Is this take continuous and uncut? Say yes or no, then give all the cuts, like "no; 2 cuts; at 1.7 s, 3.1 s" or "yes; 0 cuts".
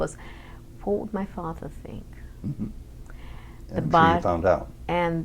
yes; 0 cuts